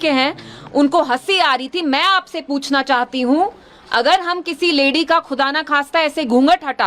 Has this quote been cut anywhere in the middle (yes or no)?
no